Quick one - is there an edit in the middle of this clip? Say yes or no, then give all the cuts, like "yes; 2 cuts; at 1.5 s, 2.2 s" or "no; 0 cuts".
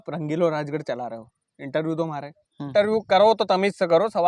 yes; 1 cut; at 2.7 s